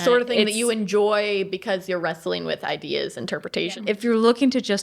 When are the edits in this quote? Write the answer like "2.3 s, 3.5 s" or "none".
3.6 s